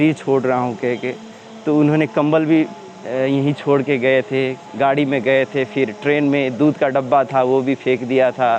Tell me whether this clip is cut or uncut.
uncut